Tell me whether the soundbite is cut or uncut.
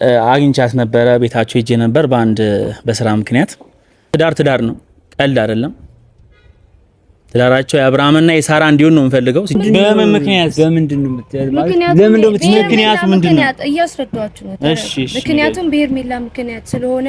cut